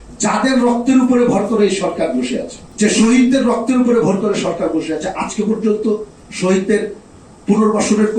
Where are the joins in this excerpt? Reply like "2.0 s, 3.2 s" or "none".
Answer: 2.6 s